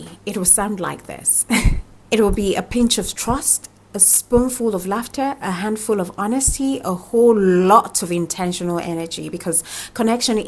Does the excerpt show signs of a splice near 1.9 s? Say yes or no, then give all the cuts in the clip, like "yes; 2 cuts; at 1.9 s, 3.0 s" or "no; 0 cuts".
yes; 1 cut; at 1.9 s